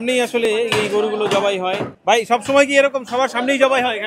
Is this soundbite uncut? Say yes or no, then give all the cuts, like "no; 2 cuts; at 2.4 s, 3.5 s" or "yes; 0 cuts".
no; 1 cut; at 1.9 s